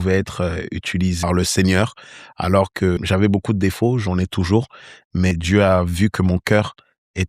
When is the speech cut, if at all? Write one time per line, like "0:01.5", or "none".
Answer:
0:01.2
0:03.0
0:05.3